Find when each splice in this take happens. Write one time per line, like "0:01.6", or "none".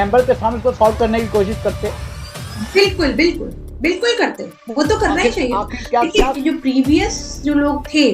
0:06.3